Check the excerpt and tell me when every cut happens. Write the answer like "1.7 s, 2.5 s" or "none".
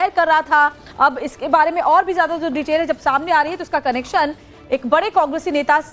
none